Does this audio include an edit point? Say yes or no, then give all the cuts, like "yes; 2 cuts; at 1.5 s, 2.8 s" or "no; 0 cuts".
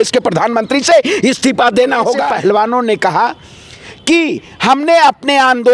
yes; 1 cut; at 2.2 s